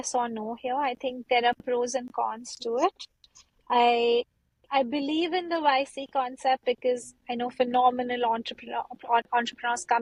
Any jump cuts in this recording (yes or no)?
no